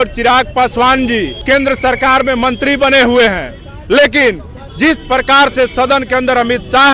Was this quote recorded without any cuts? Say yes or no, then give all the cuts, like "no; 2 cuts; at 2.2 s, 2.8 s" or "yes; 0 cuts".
no; 1 cut; at 1.4 s